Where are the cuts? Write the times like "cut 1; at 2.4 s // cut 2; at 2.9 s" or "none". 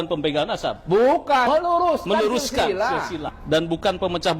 cut 1; at 1.4 s